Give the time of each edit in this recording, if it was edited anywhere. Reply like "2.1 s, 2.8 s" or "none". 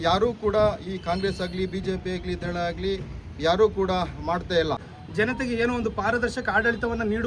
5.0 s